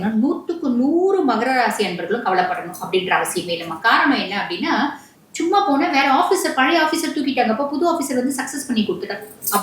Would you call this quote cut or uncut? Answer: cut